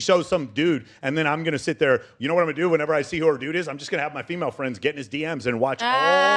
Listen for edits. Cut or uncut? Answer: uncut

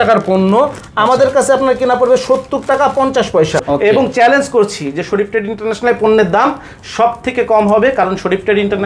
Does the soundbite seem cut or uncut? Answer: uncut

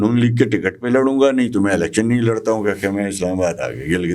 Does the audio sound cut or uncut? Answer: uncut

